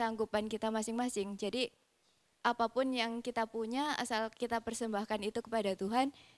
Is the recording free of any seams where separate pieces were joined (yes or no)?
yes